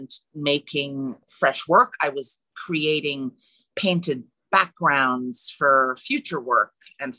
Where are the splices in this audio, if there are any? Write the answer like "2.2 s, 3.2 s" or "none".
1.2 s

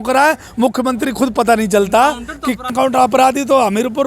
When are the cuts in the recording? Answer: 2.7 s

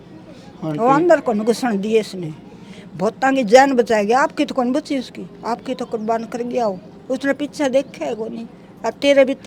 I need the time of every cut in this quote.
none

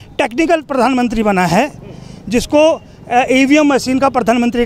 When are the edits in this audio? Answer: none

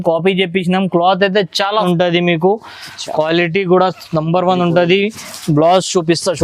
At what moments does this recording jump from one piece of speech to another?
1.9 s

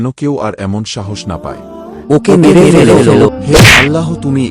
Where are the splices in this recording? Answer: 1.9 s, 3.3 s

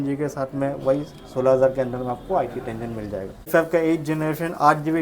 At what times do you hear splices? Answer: 3.5 s

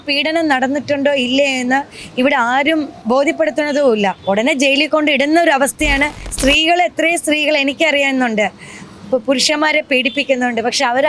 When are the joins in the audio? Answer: 3.0 s, 4.2 s, 6.2 s

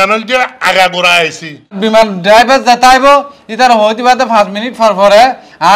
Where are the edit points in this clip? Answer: 1.6 s

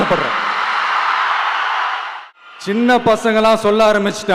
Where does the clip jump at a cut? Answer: 2.1 s

